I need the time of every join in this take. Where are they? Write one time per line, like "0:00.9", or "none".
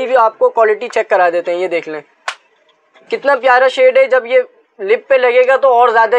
none